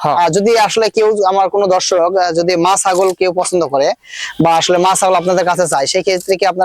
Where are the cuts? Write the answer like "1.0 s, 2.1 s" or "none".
none